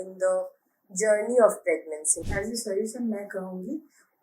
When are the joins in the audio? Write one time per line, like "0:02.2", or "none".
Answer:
0:02.1